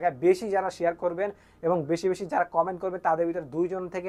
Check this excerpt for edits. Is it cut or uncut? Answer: uncut